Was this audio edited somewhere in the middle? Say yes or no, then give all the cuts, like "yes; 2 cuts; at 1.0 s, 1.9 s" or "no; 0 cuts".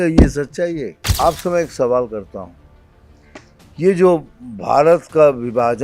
yes; 1 cut; at 1.1 s